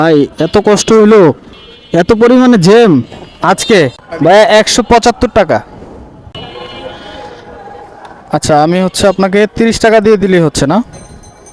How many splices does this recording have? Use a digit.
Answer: 2